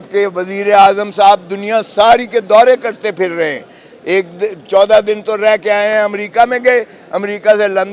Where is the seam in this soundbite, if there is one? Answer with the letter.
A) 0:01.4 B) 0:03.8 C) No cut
C